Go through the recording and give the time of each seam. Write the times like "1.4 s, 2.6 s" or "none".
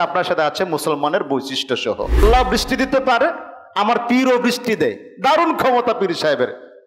2.2 s